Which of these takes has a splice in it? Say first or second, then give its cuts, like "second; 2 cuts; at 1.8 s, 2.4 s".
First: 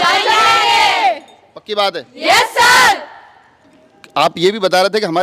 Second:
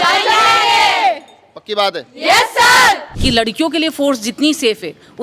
second; 1 cut; at 3.1 s